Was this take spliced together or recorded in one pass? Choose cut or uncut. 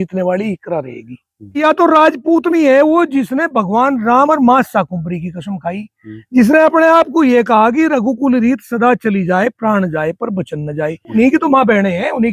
cut